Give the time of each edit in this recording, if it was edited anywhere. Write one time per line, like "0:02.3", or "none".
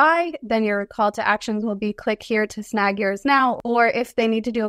0:03.6